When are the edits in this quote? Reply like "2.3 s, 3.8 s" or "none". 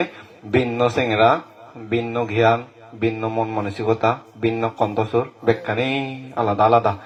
none